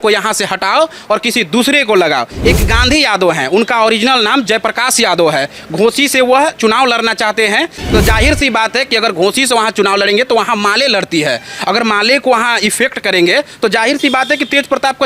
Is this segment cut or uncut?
cut